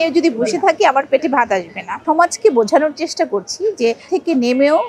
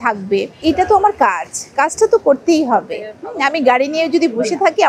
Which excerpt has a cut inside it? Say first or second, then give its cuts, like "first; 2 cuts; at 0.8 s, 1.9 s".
first; 1 cut; at 2.0 s